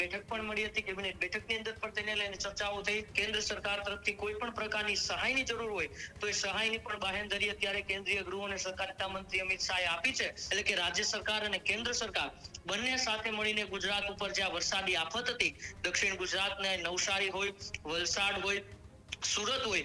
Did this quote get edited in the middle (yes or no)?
yes